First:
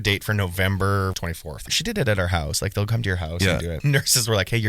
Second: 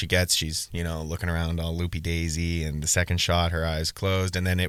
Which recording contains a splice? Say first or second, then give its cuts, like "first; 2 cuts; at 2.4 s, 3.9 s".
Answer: first; 2 cuts; at 1.7 s, 3.8 s